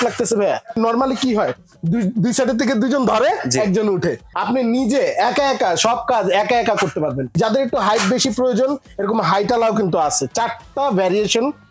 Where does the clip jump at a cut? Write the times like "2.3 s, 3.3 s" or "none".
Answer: 0.8 s, 4.3 s, 7.3 s